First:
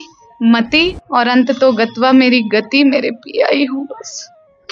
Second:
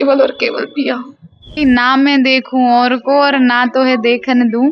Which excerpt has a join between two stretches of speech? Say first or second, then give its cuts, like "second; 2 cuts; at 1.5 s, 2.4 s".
second; 1 cut; at 1.5 s